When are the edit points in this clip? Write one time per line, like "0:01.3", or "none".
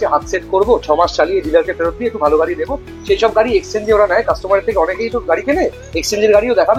none